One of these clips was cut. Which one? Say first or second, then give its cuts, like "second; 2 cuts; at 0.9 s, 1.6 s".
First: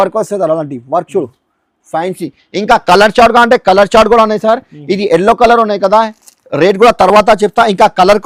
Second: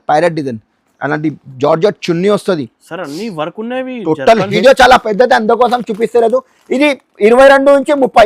second; 1 cut; at 4.5 s